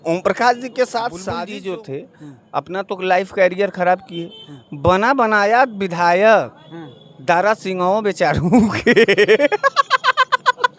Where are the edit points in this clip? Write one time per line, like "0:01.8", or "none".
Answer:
0:01.3